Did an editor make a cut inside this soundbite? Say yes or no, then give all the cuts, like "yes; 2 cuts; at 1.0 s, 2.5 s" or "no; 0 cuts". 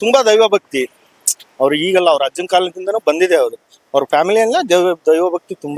no; 0 cuts